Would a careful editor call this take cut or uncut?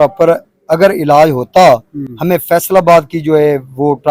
uncut